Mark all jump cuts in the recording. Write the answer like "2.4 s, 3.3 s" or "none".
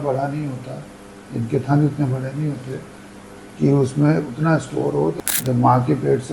5.1 s

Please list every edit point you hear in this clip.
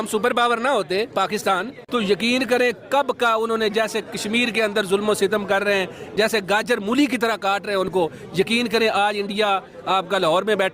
1.8 s

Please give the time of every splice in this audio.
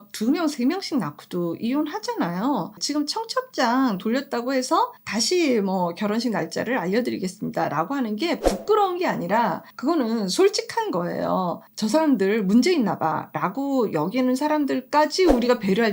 2.8 s, 5.1 s, 9.7 s, 11.6 s

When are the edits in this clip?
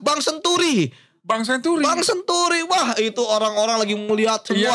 none

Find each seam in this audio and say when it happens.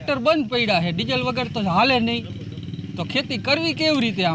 none

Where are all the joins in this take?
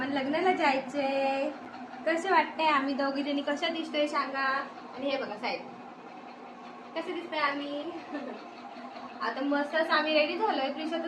none

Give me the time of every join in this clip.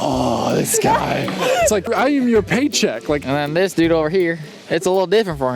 1.9 s, 3.2 s

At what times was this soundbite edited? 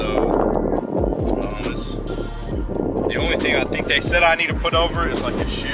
none

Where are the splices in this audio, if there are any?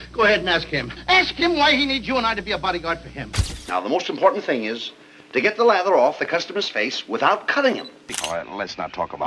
3.3 s, 8.0 s

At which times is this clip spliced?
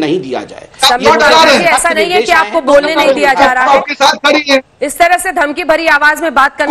none

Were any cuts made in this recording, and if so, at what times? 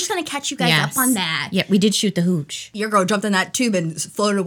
2.8 s

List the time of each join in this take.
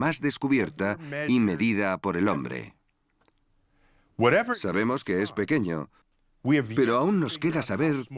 2.7 s

